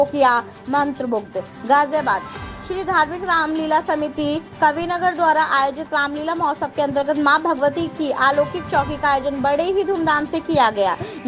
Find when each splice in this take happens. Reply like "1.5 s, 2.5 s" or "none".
none